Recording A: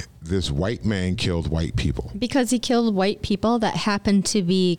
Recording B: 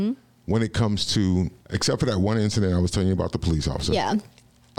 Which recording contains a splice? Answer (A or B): B